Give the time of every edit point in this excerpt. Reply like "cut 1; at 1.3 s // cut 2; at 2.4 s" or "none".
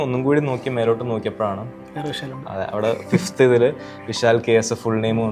none